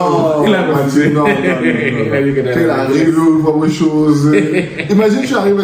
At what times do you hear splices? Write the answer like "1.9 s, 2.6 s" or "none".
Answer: none